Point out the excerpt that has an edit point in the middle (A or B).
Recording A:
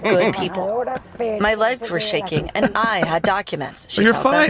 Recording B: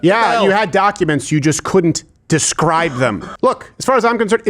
B